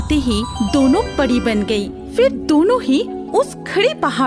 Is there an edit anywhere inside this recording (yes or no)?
no